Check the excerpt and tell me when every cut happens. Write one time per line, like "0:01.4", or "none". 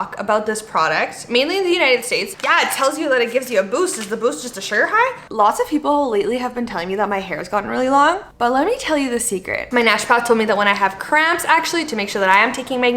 0:02.3
0:05.3
0:08.2
0:09.7